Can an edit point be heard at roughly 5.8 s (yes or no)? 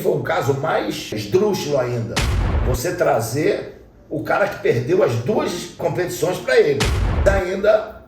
yes